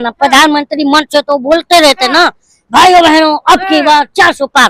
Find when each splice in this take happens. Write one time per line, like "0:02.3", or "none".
none